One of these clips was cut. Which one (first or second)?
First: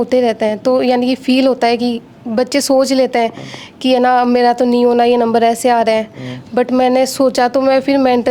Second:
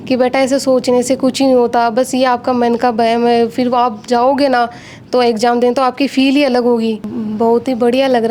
second